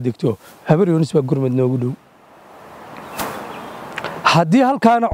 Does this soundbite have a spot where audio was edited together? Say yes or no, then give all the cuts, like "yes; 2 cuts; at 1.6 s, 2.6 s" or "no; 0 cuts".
no; 0 cuts